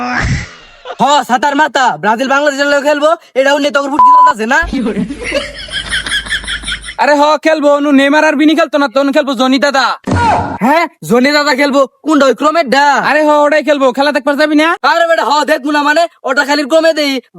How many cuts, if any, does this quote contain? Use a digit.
1